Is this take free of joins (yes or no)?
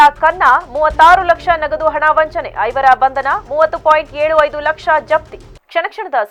yes